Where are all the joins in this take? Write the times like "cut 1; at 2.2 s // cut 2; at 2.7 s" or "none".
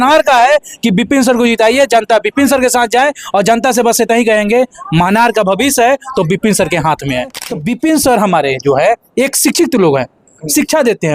cut 1; at 7.5 s